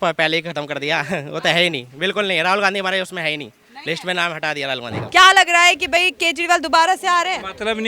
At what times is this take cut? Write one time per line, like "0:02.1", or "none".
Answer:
0:04.9